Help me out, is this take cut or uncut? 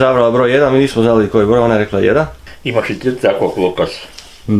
uncut